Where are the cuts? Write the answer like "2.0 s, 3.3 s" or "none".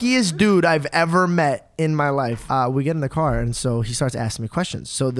2.4 s